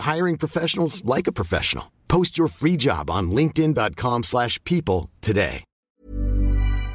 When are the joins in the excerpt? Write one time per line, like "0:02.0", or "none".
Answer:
0:06.0

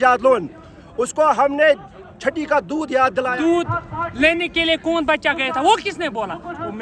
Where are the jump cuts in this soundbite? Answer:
0:03.3

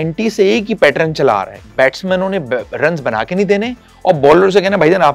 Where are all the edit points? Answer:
0:01.6

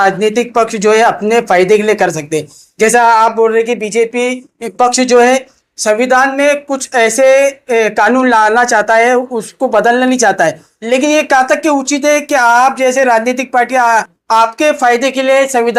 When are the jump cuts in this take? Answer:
none

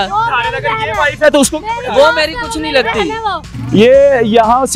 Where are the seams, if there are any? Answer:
0:03.5

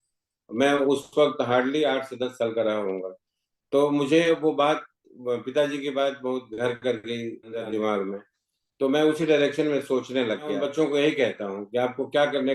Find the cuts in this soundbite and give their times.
0:07.5
0:10.6

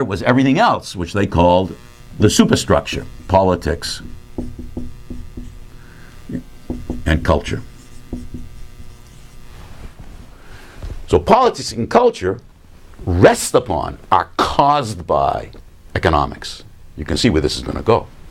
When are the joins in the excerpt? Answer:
0:08.6

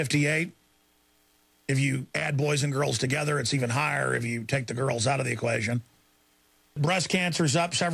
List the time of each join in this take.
0:02.1
0:06.8

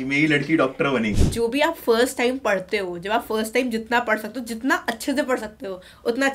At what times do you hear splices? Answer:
0:01.1

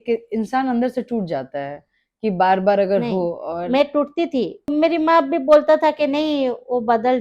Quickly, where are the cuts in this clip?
0:04.7

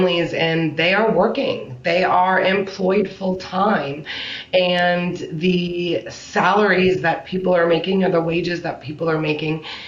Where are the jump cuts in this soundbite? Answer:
none

